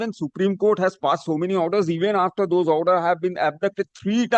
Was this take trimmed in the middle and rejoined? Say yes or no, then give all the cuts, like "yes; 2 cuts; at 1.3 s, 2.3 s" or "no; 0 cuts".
no; 0 cuts